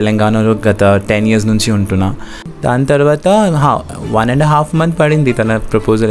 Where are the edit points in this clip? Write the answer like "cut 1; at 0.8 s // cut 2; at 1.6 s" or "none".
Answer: cut 1; at 2.5 s